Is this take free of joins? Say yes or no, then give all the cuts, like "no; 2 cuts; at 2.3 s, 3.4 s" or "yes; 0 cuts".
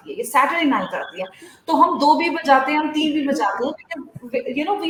yes; 0 cuts